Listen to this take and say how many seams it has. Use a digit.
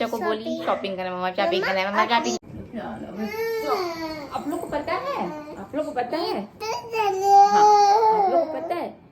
1